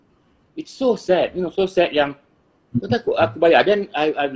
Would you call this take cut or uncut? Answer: uncut